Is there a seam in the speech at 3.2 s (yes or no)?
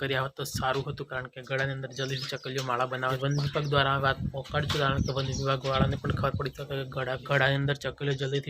yes